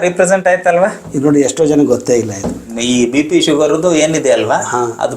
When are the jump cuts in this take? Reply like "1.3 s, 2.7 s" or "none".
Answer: 2.7 s